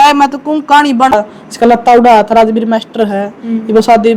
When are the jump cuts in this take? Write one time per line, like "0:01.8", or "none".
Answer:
0:01.1